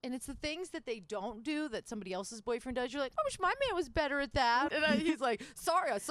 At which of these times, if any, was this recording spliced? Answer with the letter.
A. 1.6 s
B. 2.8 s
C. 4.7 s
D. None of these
C